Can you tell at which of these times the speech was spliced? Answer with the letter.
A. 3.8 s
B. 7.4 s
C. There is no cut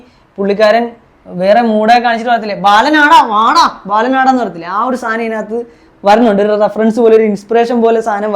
C